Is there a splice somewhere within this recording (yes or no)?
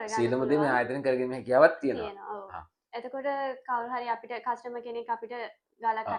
no